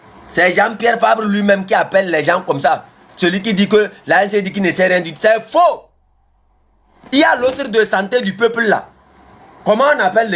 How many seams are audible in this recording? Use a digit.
0